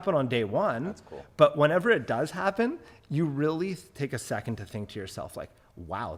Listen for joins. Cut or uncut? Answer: uncut